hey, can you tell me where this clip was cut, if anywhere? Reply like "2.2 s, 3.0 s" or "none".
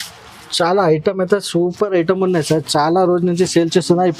none